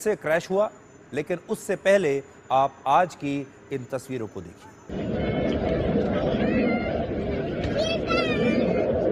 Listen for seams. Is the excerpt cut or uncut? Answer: cut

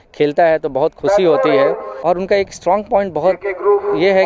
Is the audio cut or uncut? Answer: cut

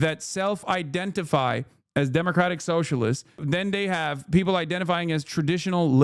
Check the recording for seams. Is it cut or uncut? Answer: cut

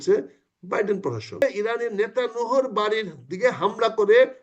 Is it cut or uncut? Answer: cut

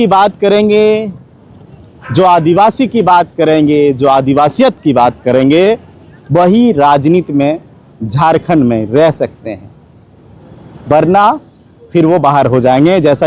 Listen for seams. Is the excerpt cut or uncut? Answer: uncut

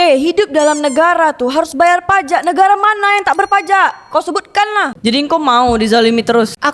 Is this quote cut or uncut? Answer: cut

